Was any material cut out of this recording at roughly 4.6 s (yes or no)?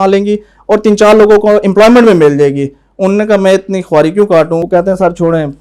yes